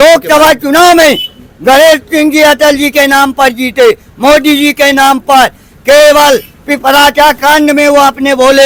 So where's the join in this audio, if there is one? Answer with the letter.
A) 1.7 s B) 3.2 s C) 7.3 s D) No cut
D